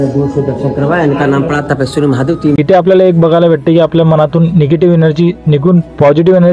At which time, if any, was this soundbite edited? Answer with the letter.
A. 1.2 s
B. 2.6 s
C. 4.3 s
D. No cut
B